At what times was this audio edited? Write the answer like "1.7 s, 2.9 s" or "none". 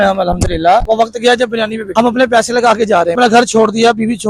0.8 s, 1.8 s, 3.2 s